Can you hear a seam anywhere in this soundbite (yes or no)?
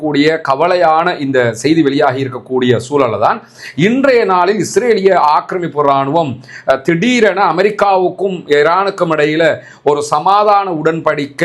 no